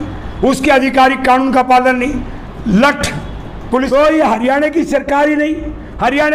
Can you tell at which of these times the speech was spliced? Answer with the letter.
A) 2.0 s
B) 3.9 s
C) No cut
B